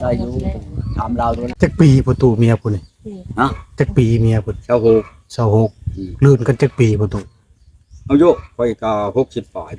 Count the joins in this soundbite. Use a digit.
1